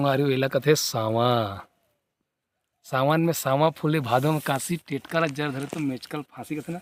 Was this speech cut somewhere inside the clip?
no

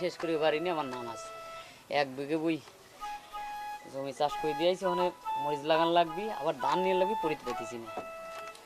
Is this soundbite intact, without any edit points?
yes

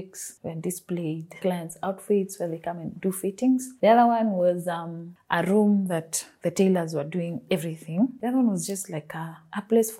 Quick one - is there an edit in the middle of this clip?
yes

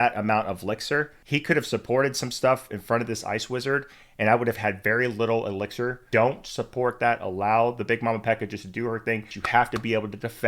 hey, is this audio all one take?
no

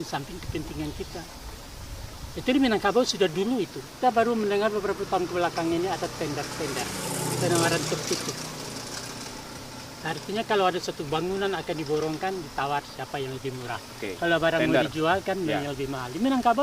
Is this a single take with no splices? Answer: no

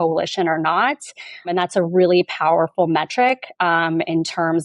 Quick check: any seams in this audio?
yes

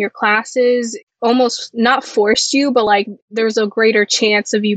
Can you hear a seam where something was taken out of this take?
yes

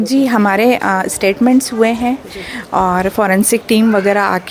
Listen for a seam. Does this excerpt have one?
no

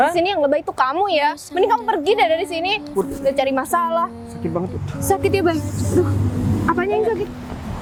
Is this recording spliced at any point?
no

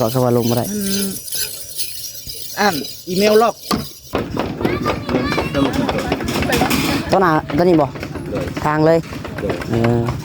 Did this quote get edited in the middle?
yes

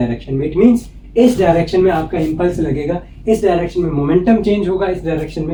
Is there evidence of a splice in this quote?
no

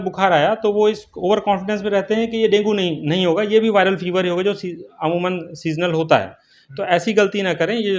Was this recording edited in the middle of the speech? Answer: no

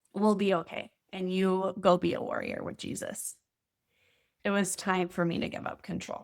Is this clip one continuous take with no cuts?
no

